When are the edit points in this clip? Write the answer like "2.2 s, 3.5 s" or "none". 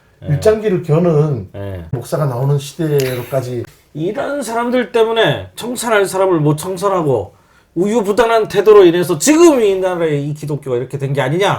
2.0 s, 3.6 s